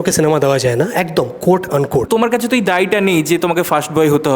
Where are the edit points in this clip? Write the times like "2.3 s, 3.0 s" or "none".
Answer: 2.1 s

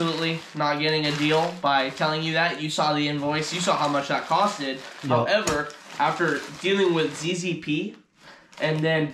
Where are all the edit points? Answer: none

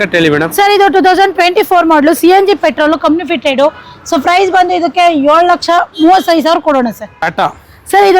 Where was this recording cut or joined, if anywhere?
7.2 s

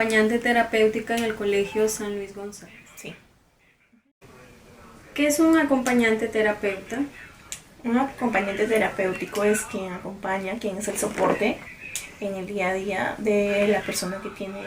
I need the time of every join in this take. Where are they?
3.9 s

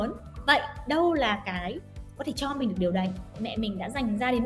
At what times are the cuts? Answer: 3.3 s

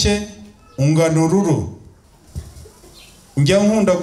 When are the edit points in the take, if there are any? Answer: 2.1 s

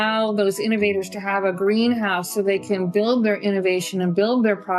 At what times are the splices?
none

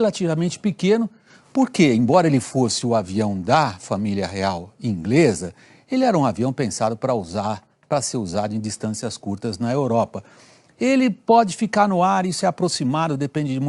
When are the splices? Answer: 1.7 s

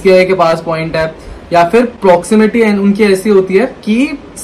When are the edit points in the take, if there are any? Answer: none

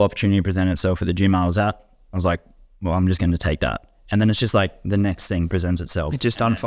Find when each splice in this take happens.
none

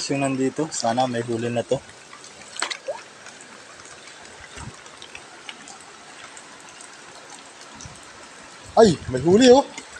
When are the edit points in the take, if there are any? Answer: none

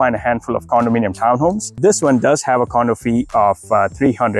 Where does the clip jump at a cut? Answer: 1.8 s

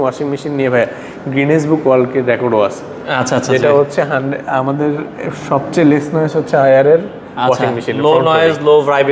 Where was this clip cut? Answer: none

